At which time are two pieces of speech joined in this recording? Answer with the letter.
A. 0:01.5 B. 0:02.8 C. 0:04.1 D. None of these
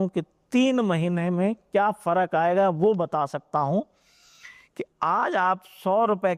D